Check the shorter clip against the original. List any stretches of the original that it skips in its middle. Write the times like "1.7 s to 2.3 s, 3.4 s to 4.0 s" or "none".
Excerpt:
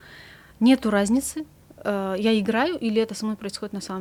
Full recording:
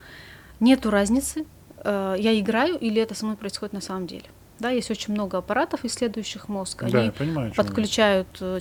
none

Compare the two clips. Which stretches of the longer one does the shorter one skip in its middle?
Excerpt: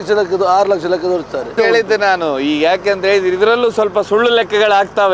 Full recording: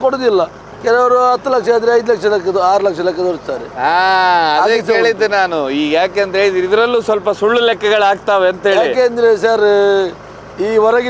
3.7 s to 4.8 s

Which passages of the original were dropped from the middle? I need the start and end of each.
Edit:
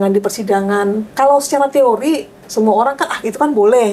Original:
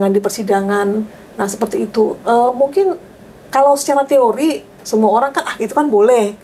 1.1 s to 3.4 s

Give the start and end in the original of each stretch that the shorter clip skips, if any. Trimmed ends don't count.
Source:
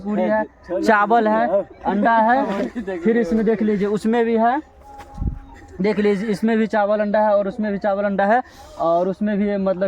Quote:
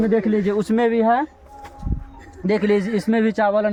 none

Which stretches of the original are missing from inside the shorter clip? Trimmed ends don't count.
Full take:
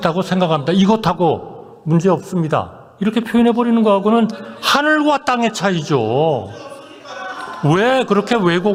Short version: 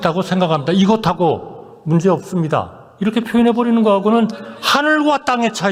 none

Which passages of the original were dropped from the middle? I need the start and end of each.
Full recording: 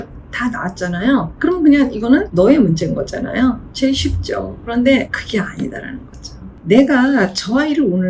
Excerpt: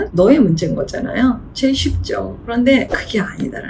none

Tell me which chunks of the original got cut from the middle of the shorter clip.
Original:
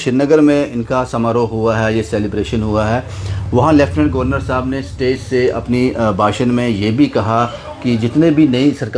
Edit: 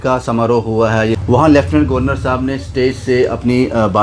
2.1 s to 3.4 s

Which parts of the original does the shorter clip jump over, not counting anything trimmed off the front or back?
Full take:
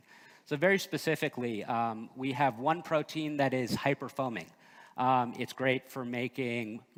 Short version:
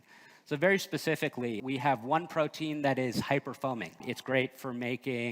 1.6 s to 2.1 s, 4.6 s to 5.4 s

